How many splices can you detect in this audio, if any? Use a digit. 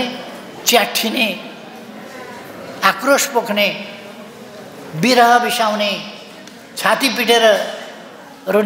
0